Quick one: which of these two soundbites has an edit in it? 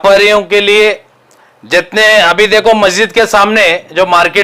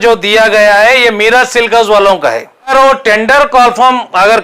second; 1 cut; at 2.7 s

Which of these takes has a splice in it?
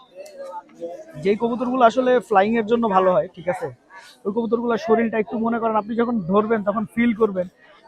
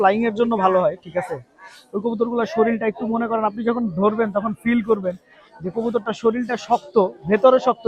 first; 1 cut; at 1.1 s

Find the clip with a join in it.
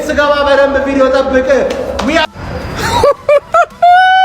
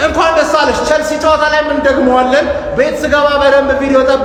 first; 1 cut; at 2.2 s

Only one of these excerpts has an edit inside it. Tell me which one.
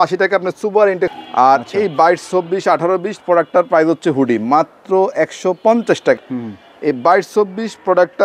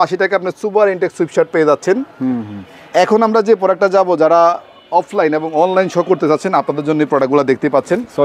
first; 2 cuts; at 1.2 s, 6.2 s

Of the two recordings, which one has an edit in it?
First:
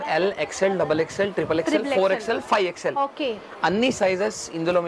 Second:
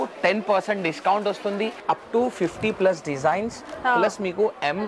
second; 1 cut; at 1.8 s

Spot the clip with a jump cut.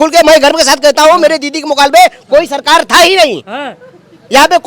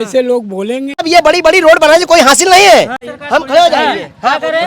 second; 2 cuts; at 1.0 s, 3.0 s

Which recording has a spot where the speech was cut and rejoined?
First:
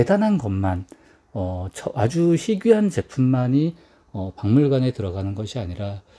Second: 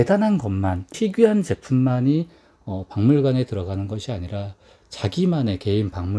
second; 1 cut; at 1.0 s

